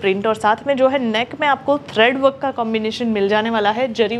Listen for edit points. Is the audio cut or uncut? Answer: uncut